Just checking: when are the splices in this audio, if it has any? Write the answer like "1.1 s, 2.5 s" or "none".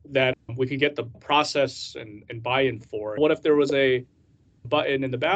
1.1 s, 3.2 s